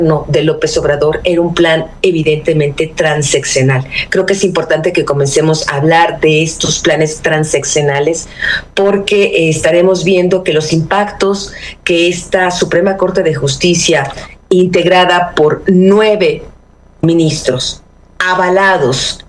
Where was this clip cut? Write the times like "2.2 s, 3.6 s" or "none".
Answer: none